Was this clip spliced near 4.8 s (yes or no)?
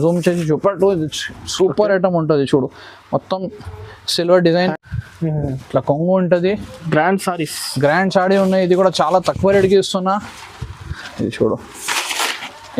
yes